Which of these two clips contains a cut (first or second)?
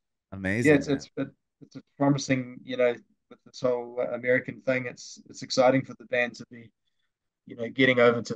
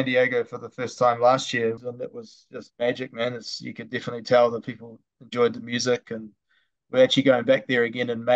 second